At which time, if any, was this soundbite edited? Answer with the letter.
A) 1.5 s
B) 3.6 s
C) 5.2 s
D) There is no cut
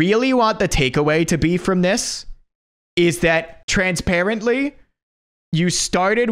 B